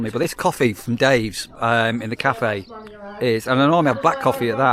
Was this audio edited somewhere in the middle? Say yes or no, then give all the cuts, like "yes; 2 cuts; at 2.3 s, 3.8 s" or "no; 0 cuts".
no; 0 cuts